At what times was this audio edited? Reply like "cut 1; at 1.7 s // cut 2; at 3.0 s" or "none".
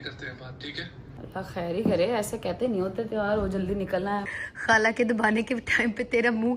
cut 1; at 1.1 s // cut 2; at 4.4 s